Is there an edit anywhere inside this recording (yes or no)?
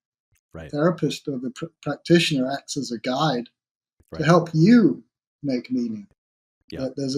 no